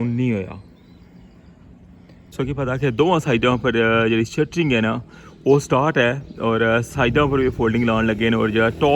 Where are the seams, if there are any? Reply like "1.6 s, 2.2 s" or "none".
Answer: 2.3 s